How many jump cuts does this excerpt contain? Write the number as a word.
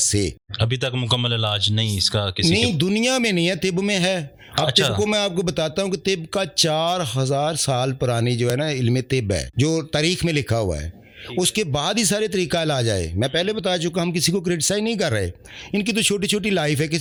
zero